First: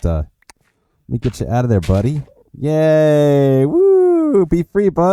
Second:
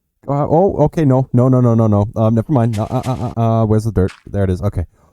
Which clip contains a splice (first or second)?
second